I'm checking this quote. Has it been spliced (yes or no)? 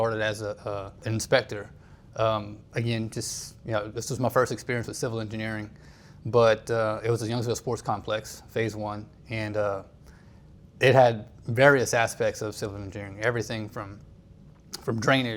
yes